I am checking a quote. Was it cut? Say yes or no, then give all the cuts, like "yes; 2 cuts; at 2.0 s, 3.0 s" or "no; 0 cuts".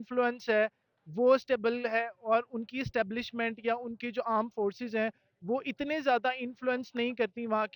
no; 0 cuts